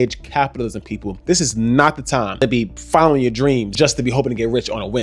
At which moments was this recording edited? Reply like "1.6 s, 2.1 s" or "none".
2.4 s, 3.7 s

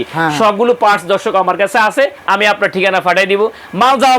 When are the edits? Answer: 2.2 s

